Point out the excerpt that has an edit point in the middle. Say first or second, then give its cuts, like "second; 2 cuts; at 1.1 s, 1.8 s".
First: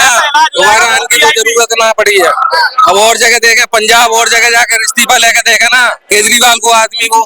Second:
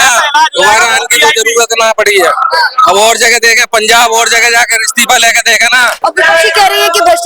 second; 1 cut; at 5.9 s